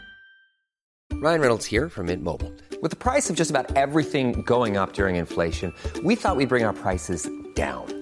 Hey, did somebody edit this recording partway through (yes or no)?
yes